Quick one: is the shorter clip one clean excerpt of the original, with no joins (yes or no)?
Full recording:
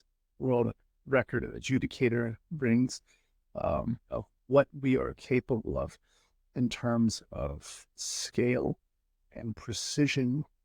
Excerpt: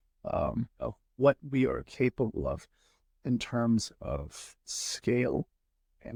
yes